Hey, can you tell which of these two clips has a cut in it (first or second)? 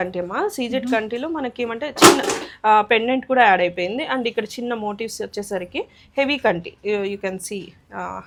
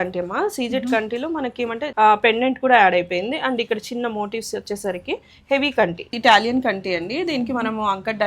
second